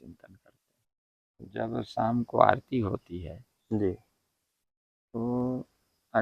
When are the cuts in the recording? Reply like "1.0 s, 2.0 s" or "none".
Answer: 1.6 s